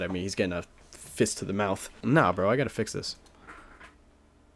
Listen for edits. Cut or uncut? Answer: uncut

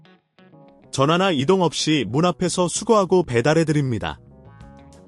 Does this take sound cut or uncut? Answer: cut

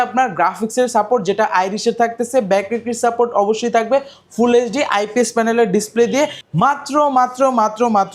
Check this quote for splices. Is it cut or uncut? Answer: cut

